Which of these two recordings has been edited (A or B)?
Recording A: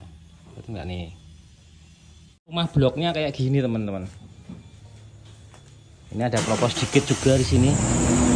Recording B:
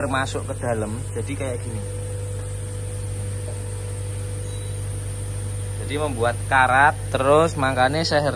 A